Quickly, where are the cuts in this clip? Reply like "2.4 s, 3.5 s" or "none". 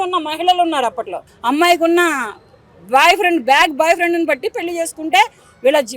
1.2 s